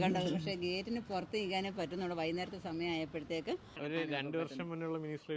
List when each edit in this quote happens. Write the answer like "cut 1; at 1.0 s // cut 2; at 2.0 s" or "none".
cut 1; at 3.7 s